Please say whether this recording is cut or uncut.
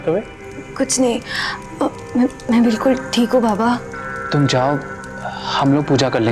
uncut